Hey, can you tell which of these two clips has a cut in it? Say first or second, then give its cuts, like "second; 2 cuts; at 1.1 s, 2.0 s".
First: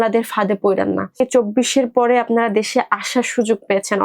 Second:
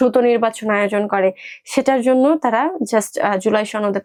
first; 1 cut; at 1.2 s